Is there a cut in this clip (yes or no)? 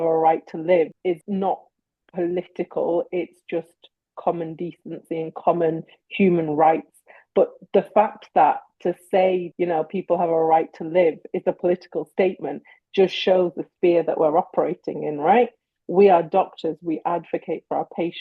yes